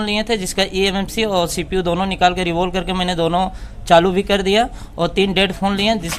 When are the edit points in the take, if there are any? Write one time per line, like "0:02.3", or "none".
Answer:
none